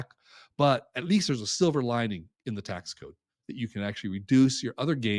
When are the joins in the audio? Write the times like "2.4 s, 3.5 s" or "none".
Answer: none